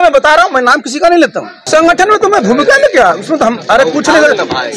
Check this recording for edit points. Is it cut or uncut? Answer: cut